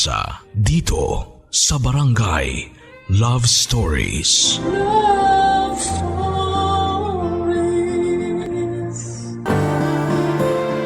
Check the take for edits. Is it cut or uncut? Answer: cut